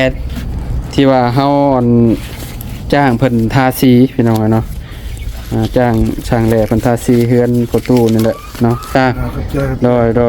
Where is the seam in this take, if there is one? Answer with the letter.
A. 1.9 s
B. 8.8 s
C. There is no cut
B